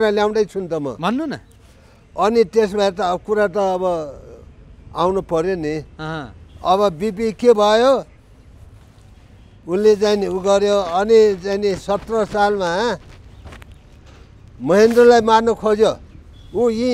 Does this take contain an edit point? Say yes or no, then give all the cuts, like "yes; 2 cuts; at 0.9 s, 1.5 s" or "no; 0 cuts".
no; 0 cuts